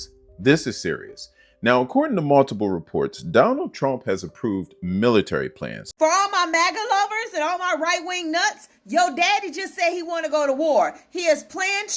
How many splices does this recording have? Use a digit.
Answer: 1